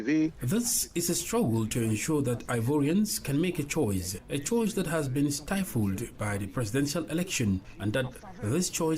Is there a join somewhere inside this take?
yes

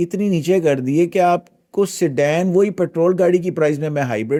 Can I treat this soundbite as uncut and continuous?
yes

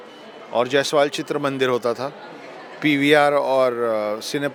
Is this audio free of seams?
yes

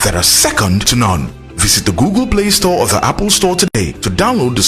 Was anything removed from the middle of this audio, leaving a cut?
no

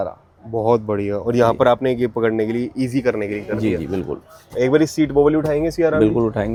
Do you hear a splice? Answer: no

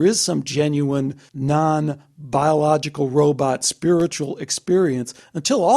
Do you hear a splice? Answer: yes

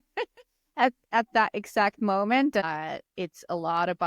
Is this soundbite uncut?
no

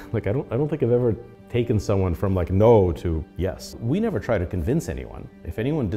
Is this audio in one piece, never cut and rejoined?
no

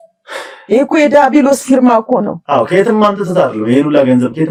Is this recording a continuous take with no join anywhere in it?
yes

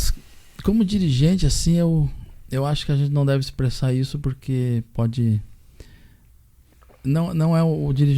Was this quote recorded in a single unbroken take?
yes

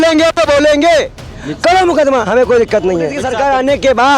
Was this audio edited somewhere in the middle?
yes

